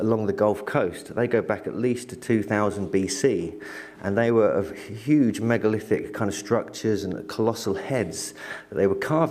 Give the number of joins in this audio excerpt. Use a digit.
1